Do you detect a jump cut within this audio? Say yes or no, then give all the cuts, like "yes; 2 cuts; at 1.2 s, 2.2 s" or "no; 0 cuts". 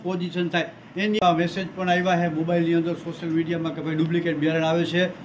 yes; 1 cut; at 1.2 s